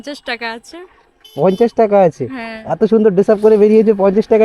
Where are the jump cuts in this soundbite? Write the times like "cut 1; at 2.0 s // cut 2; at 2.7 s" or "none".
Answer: none